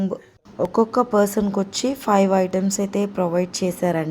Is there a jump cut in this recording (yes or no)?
no